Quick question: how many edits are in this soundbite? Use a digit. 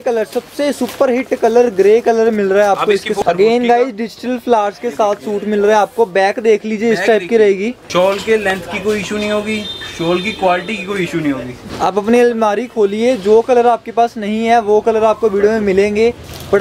3